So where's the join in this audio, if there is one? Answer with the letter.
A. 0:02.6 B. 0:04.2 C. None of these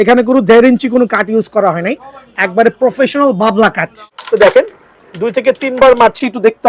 B